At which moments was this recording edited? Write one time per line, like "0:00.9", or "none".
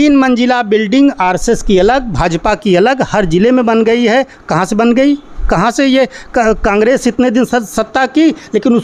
none